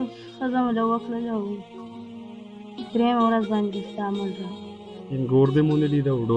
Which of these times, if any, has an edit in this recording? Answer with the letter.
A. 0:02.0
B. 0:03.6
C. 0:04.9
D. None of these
C